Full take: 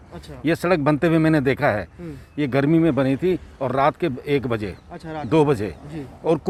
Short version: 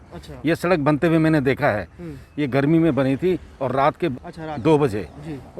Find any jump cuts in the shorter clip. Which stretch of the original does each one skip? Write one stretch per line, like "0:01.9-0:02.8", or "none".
0:04.2-0:04.9